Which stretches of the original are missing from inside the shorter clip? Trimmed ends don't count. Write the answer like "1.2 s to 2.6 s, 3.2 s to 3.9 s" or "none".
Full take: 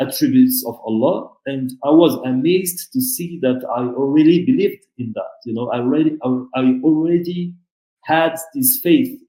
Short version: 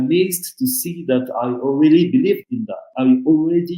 5.2 s to 6.5 s

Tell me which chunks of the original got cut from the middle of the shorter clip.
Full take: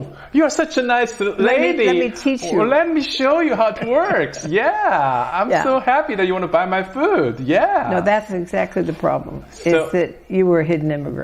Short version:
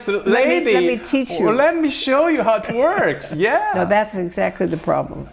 4.8 s to 7.9 s

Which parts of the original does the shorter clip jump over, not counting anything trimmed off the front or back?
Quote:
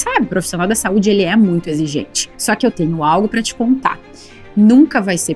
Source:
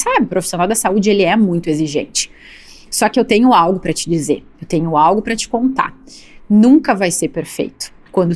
2.6 s to 4.6 s

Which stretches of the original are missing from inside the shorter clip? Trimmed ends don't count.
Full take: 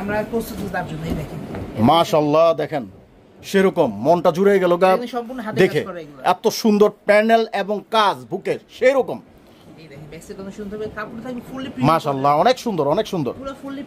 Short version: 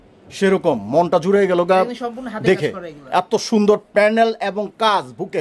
none

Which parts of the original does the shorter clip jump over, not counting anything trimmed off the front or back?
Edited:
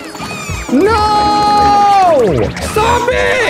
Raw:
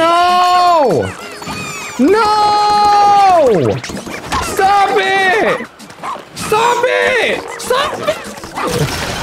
3.9 s to 6.4 s

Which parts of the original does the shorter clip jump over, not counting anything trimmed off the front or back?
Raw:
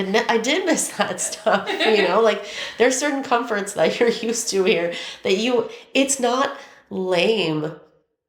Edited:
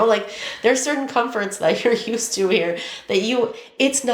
none

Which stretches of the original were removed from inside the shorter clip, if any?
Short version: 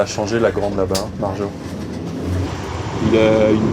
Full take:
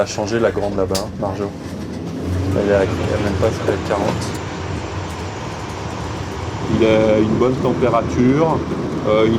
2.5 s to 6.1 s

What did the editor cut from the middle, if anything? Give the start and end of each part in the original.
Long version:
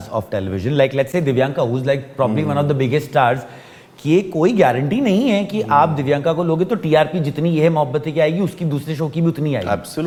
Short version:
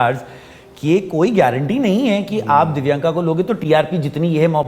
none

